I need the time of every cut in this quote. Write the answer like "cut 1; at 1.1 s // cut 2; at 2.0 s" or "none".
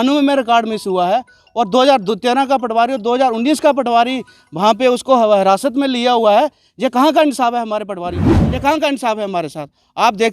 cut 1; at 8.4 s